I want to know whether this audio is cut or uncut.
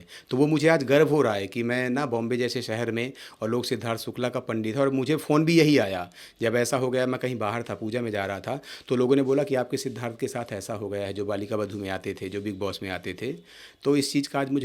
uncut